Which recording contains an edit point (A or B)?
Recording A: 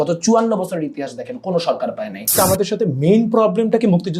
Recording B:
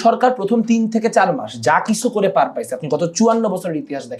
A